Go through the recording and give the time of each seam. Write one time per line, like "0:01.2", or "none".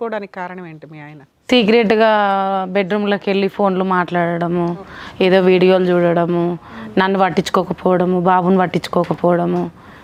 none